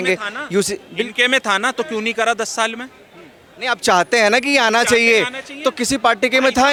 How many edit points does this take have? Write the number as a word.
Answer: zero